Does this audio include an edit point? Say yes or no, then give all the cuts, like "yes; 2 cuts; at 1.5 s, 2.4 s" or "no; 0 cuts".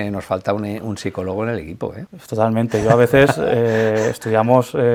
no; 0 cuts